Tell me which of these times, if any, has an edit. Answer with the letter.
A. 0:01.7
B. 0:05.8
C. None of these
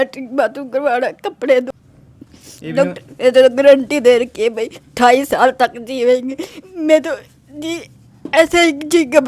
A